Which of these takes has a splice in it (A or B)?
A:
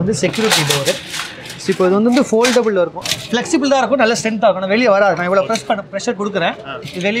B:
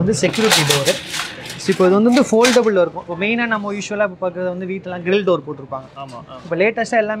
A